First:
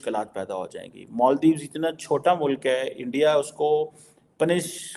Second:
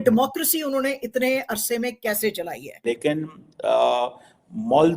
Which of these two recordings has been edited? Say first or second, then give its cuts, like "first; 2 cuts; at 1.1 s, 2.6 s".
second; 1 cut; at 2.7 s